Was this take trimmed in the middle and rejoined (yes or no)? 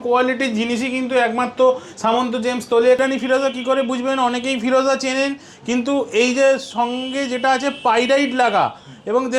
yes